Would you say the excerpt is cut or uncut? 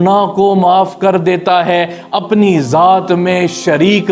uncut